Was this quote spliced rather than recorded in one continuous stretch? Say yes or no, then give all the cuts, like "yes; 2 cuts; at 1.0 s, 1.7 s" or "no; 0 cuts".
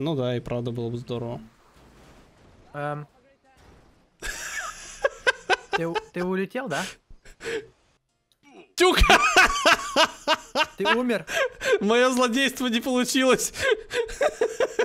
no; 0 cuts